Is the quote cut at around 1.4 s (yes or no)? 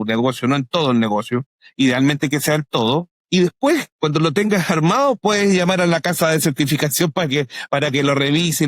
no